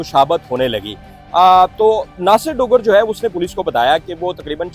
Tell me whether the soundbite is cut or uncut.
uncut